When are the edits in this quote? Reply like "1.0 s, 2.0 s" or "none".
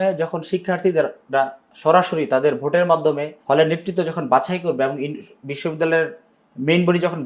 3.3 s